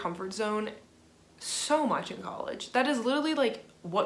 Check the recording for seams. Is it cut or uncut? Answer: uncut